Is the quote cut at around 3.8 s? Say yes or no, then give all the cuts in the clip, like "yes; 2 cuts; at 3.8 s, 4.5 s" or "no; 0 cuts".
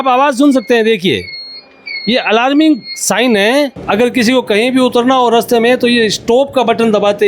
yes; 1 cut; at 3.8 s